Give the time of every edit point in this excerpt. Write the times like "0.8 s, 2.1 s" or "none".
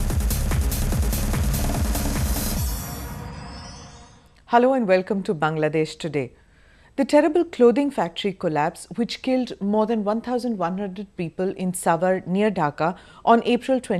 2.1 s